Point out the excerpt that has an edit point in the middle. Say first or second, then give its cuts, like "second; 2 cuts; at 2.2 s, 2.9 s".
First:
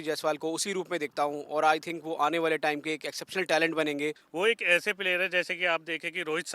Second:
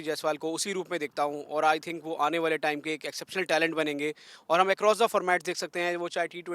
first; 1 cut; at 4.2 s